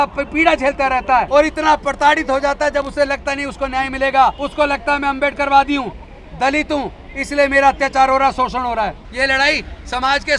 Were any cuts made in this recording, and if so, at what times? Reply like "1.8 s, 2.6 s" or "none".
1.3 s, 4.4 s, 9.0 s